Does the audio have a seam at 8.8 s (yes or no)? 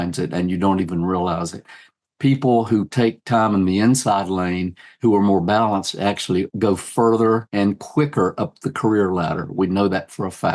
no